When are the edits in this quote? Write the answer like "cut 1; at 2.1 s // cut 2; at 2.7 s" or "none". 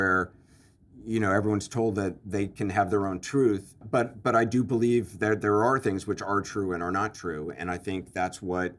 cut 1; at 3.8 s